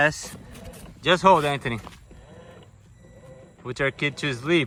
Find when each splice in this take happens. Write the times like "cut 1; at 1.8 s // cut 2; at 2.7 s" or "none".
none